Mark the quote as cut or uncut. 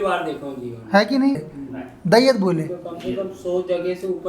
cut